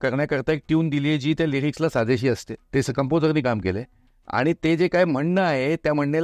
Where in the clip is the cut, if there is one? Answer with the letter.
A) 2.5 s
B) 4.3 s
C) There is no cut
A